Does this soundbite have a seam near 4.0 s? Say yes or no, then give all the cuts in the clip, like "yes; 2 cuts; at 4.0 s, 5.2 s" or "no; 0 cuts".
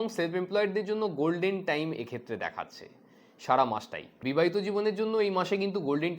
yes; 1 cut; at 4.0 s